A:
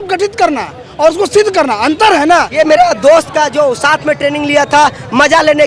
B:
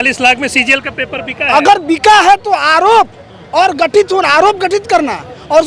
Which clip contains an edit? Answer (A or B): A